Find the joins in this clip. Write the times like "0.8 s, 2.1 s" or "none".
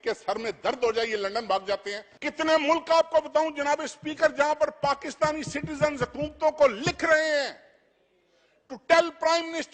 2.1 s

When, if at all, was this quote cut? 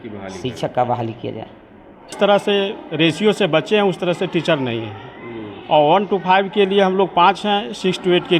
2.1 s

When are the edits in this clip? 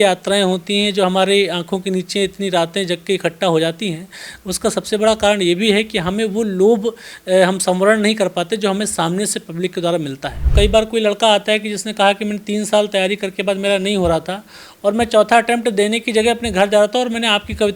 10.4 s

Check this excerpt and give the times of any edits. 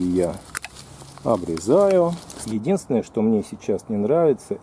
2.3 s

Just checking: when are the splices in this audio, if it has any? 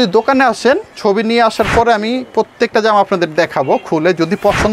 none

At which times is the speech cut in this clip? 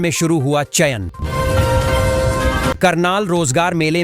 1.2 s, 2.8 s

